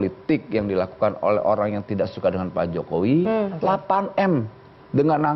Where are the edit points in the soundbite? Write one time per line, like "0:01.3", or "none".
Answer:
0:03.5